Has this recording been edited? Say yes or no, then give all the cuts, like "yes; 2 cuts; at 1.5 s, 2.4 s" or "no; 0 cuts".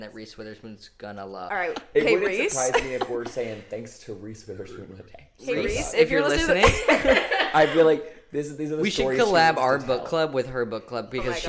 yes; 1 cut; at 1.5 s